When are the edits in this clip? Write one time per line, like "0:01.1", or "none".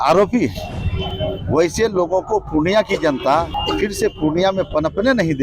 0:03.5